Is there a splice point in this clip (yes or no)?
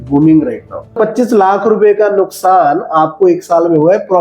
yes